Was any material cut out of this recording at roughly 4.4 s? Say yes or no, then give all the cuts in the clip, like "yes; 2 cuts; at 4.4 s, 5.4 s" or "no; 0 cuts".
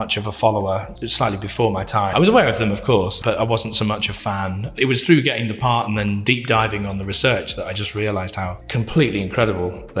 no; 5 cuts; at 0.9 s, 2.1 s, 3.1 s, 6.2 s, 8.6 s